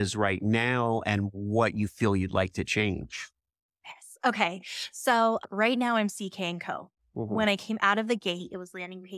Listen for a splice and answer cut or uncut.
uncut